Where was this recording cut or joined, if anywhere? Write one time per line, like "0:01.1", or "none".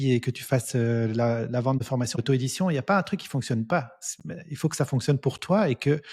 0:02.2